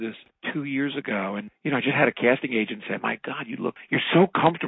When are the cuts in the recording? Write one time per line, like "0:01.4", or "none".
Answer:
0:01.5

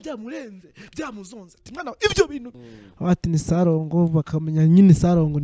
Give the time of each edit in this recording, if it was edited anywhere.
0:02.6

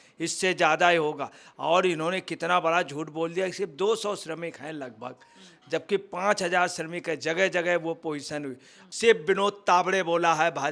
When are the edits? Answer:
0:08.8

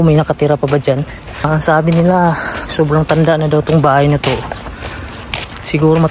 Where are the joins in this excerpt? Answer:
0:01.5

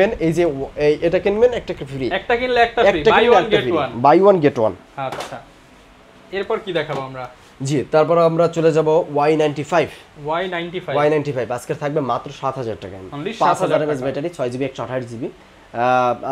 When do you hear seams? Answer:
none

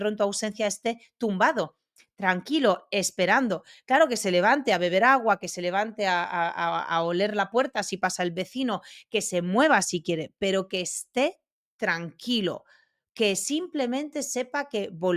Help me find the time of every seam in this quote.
none

